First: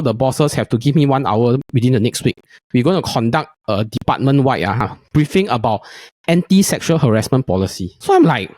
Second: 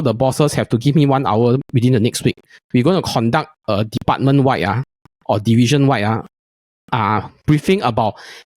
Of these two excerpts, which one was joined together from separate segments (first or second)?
first